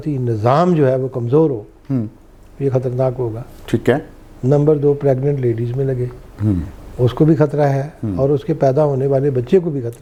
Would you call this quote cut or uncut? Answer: uncut